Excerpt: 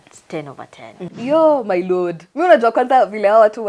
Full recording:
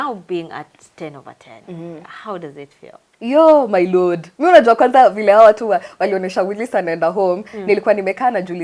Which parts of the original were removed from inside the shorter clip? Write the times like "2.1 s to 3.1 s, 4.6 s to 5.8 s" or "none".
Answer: 1.8 s to 3.1 s